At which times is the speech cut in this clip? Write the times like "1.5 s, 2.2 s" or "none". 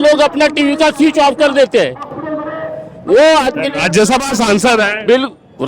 none